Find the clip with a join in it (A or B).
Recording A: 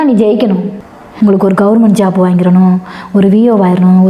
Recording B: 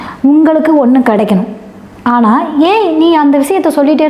A